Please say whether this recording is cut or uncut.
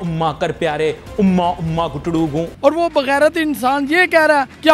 uncut